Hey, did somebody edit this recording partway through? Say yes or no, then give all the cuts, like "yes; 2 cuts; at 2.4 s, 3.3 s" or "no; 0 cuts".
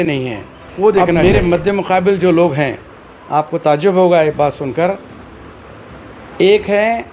yes; 1 cut; at 1.2 s